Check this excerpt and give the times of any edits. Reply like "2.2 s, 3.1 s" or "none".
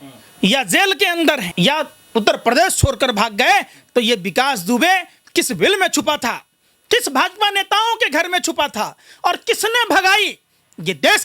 1.5 s